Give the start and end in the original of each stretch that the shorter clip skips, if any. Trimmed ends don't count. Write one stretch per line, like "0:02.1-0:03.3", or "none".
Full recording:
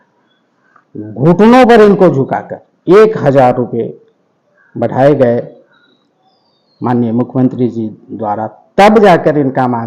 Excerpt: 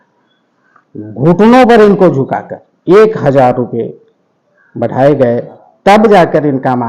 0:05.6-0:08.6

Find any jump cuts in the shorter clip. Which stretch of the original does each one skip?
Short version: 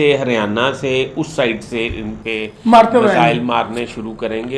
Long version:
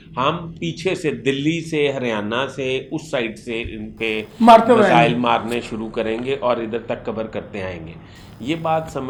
none

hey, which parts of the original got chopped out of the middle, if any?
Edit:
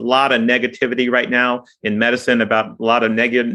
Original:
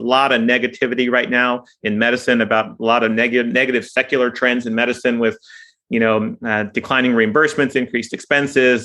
none

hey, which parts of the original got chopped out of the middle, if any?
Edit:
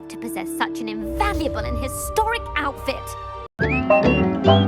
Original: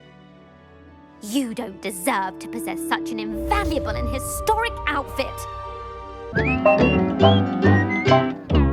0:05.7-0:06.2

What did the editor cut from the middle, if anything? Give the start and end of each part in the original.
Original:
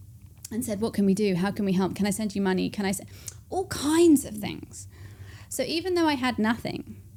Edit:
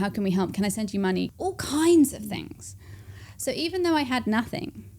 0:02.7-0:03.4

